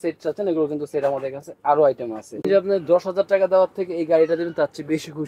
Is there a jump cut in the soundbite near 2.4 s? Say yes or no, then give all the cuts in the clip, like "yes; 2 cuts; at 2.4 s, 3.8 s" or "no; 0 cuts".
yes; 1 cut; at 2.4 s